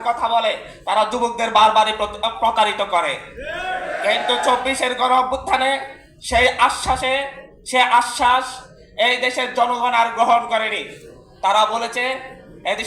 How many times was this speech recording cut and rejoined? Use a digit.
0